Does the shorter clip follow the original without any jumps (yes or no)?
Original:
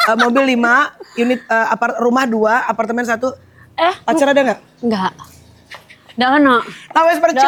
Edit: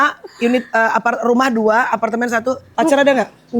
no